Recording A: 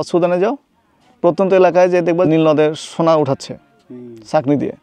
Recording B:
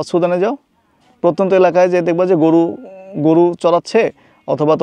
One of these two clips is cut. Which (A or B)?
A